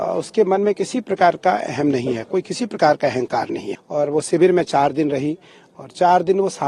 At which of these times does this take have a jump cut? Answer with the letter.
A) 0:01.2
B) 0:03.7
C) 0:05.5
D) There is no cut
B